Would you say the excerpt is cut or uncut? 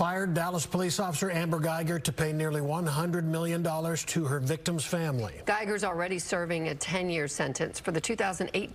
uncut